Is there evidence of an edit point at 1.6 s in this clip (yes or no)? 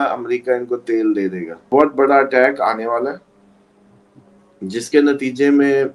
yes